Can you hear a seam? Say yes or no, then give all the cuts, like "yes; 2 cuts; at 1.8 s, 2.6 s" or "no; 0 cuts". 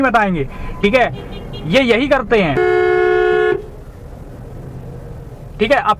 yes; 1 cut; at 2.6 s